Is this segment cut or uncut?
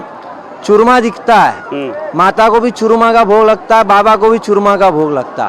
uncut